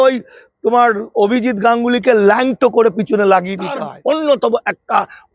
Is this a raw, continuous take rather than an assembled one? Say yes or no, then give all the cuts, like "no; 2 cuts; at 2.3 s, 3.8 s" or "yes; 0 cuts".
no; 1 cut; at 3.9 s